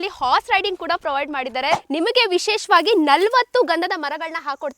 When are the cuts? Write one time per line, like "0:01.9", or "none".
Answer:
0:01.8